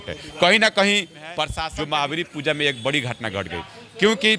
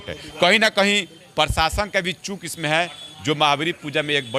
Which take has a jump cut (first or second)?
first